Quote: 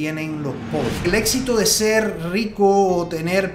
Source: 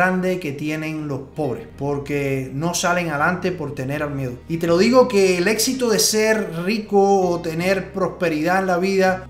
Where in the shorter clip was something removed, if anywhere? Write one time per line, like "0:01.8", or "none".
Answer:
0:01.0